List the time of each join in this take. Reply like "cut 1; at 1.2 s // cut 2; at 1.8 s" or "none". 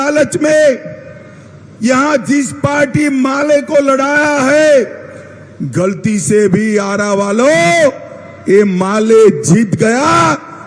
none

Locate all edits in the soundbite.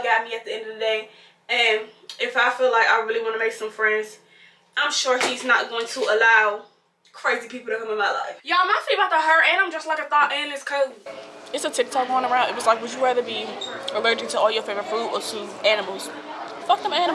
cut 1; at 8.4 s // cut 2; at 11.1 s

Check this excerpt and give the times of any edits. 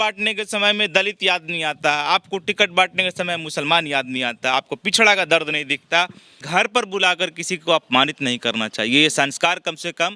cut 1; at 6.4 s

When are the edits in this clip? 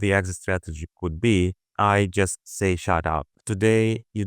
cut 1; at 1.7 s // cut 2; at 3.3 s

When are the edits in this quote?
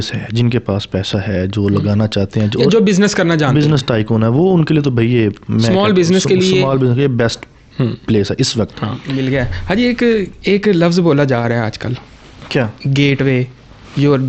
cut 1; at 9.1 s

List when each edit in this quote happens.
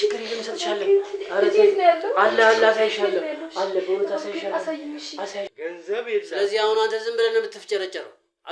cut 1; at 5.5 s

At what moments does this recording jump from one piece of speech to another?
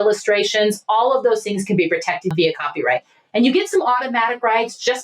cut 1; at 2.3 s

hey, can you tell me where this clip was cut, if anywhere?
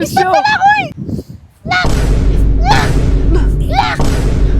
cut 1; at 1.0 s

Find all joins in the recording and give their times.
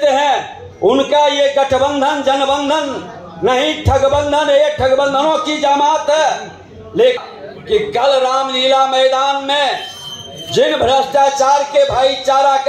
cut 1; at 7.2 s

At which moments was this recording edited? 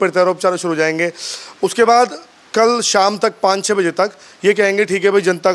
none

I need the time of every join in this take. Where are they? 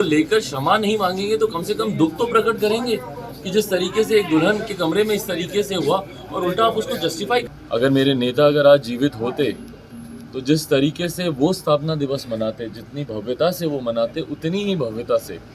cut 1; at 7.5 s

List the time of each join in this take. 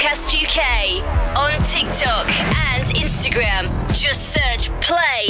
none

